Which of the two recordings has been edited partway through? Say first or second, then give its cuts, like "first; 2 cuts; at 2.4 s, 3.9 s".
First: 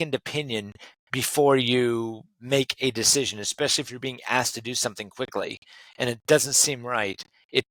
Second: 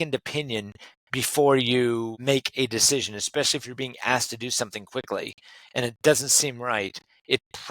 second; 1 cut; at 2.1 s